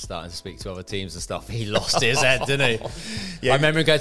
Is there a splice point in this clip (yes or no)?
no